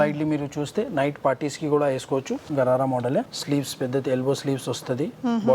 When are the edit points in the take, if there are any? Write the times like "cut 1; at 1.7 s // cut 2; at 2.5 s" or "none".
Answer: cut 1; at 2.5 s